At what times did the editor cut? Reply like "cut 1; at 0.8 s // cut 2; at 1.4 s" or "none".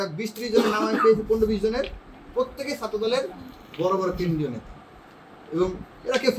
none